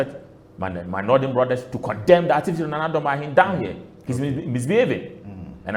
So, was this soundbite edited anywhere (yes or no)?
no